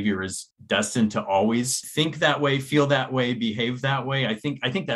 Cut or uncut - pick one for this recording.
cut